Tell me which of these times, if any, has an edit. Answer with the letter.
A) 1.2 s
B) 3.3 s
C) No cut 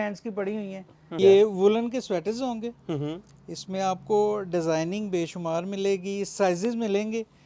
A